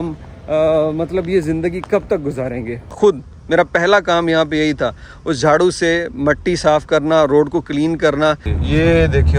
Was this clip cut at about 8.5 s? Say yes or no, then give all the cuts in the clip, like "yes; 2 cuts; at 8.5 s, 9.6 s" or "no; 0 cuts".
yes; 2 cuts; at 2.9 s, 8.5 s